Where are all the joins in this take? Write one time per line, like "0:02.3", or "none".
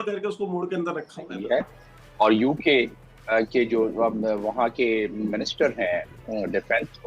0:01.4